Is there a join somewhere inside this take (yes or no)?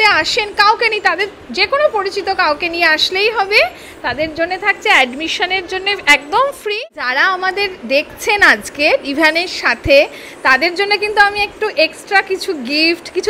yes